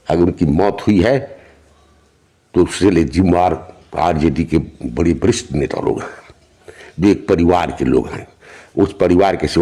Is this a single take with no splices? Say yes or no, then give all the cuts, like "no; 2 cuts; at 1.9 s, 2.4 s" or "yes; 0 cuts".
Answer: yes; 0 cuts